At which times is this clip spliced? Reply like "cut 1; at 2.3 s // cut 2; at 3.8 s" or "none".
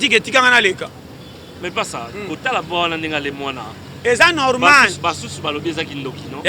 cut 1; at 1.6 s